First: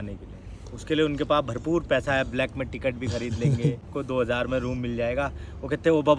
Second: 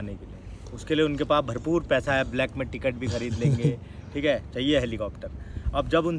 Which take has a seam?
first; 1 cut; at 3.9 s

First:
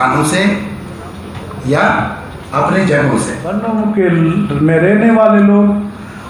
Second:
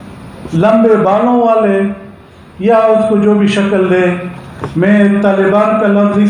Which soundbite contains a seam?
first; 1 cut; at 3.5 s

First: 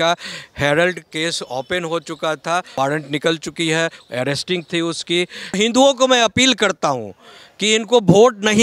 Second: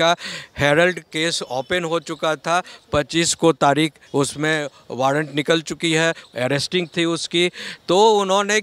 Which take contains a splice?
first; 2 cuts; at 2.7 s, 5.6 s

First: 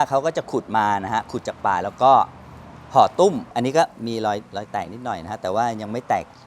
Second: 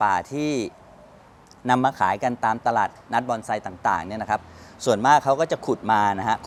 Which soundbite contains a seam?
first; 1 cut; at 3.5 s

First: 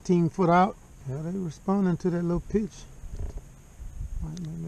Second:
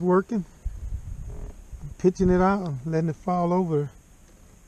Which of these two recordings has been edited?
first; 1 cut; at 1.2 s

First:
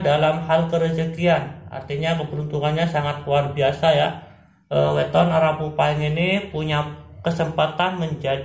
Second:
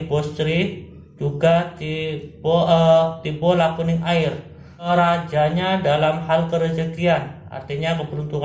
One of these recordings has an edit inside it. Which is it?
second; 1 cut; at 4.9 s

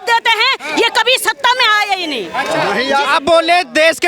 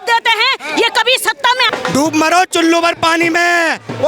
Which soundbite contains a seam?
second; 1 cut; at 1.7 s

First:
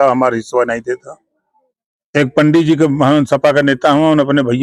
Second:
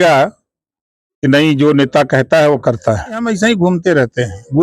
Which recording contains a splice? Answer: second; 1 cut; at 3.3 s

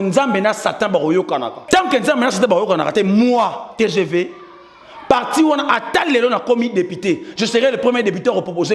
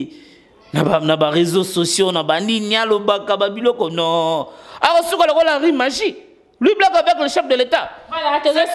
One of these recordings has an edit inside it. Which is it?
first; 1 cut; at 1.5 s

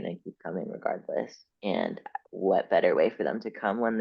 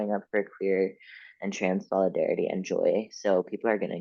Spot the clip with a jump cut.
first; 1 cut; at 1.4 s

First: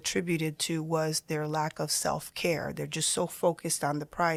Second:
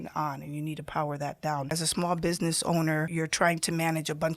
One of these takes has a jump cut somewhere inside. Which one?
second; 2 cuts; at 1.8 s, 3.1 s

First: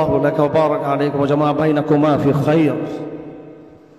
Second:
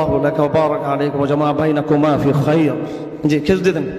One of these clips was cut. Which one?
second; 1 cut; at 3.1 s

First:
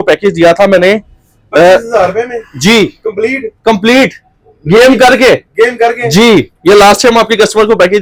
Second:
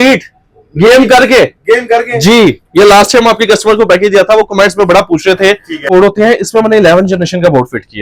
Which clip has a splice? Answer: second; 1 cut; at 5.9 s

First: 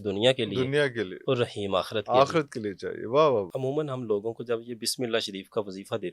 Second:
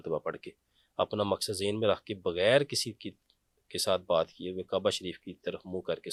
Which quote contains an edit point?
first; 1 cut; at 3.5 s

